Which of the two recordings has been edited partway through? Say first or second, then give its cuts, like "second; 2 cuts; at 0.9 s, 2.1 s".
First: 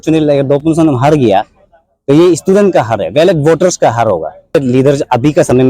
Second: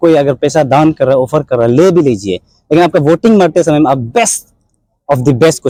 first; 1 cut; at 4.5 s